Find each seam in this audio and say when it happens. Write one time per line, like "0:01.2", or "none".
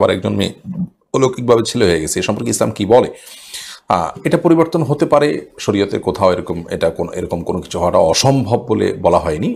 none